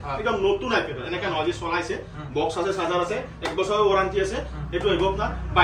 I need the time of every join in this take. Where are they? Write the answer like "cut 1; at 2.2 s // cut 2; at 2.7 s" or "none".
none